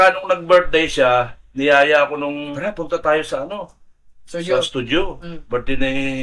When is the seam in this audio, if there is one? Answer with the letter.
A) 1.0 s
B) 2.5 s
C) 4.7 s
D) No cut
B